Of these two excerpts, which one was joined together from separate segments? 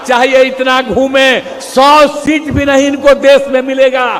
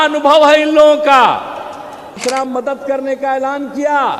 second; 1 cut; at 2.1 s

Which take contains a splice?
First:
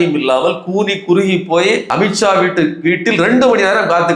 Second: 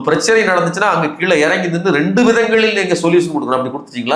first; 1 cut; at 1.9 s

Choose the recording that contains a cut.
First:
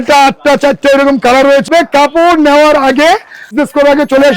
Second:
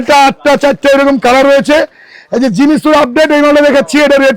first; 2 cuts; at 1.7 s, 3.5 s

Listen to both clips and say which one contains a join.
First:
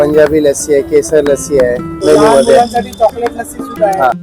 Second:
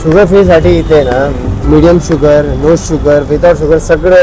first; 1 cut; at 2.0 s

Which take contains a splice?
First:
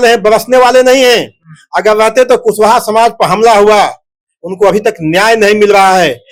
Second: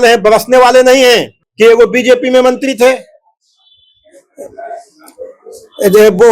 second; 1 cut; at 1.4 s

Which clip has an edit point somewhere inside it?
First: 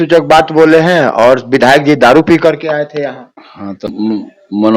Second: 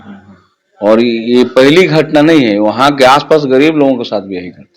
first; 1 cut; at 3.9 s

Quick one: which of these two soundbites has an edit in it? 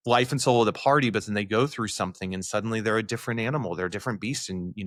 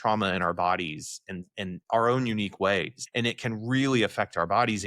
second; 2 cuts; at 1.8 s, 3.0 s

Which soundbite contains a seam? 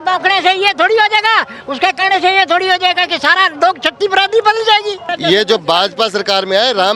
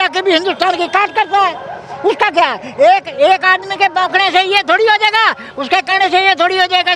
first; 1 cut; at 5.1 s

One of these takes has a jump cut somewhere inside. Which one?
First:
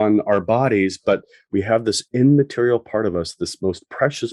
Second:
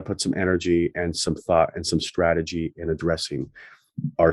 first; 1 cut; at 1.4 s

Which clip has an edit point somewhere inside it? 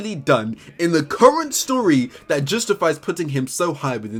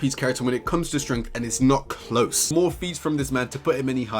second; 1 cut; at 2.5 s

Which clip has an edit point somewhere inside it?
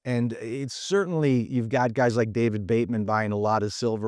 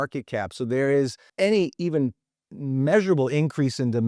second; 1 cut; at 1.2 s

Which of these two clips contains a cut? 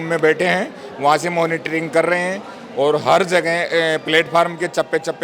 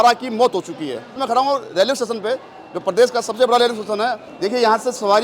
second; 2 cuts; at 1.2 s, 4.3 s

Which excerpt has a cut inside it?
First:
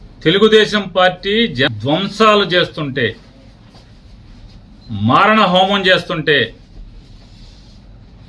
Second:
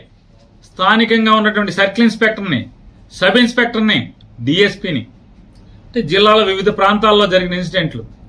first; 1 cut; at 1.7 s

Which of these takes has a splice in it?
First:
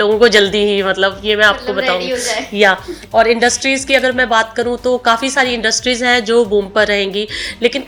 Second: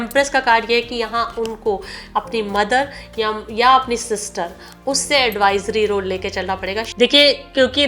second; 1 cut; at 6.9 s

